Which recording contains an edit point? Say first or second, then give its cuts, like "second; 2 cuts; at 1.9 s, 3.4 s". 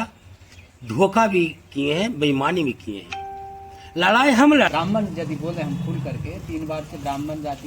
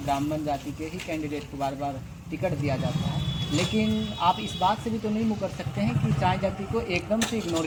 first; 1 cut; at 4.7 s